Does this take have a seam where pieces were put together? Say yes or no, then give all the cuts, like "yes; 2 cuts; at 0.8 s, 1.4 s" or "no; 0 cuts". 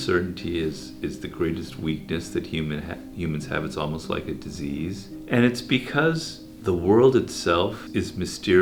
no; 0 cuts